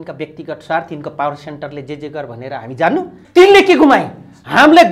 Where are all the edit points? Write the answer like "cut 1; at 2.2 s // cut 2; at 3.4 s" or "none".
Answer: cut 1; at 3.2 s